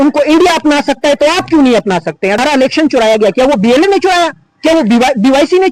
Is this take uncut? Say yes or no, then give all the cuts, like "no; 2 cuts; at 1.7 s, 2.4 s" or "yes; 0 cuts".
no; 1 cut; at 2.4 s